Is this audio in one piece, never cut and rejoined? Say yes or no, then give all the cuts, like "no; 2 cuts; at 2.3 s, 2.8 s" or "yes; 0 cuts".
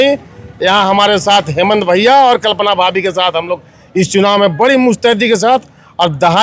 yes; 0 cuts